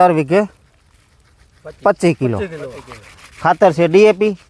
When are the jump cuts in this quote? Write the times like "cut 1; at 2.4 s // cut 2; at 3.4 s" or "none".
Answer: none